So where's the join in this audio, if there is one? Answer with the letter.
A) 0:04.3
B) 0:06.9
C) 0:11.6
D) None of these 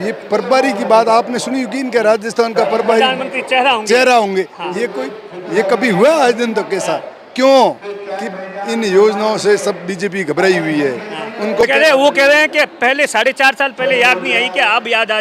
C